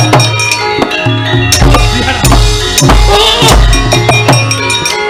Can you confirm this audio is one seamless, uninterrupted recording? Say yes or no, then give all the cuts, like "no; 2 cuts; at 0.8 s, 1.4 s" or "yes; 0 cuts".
yes; 0 cuts